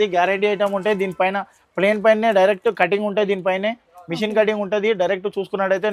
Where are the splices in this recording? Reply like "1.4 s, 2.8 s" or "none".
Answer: none